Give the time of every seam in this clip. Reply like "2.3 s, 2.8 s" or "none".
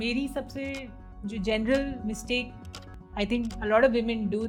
none